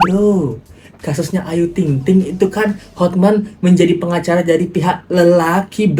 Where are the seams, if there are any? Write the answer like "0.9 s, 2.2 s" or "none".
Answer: none